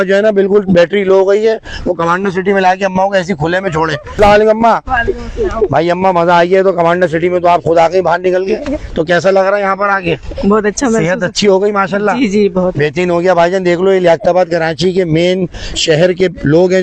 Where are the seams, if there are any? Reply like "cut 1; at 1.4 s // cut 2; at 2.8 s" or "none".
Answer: cut 1; at 4.1 s